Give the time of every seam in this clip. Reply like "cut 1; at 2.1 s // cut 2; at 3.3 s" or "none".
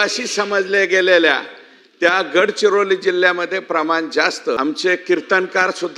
cut 1; at 4.6 s